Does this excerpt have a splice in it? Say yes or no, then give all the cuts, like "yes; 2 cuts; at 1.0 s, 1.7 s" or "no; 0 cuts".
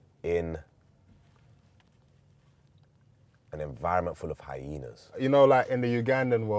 yes; 1 cut; at 5.2 s